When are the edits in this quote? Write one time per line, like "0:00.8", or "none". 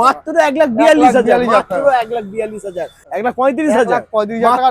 0:03.0